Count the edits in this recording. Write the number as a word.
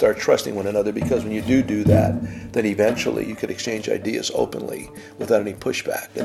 zero